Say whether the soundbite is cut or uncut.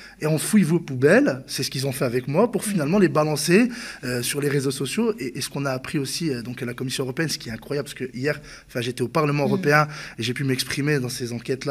uncut